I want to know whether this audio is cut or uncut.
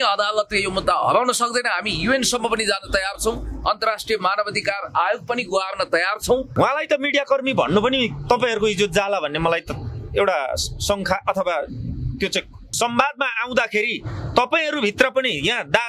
cut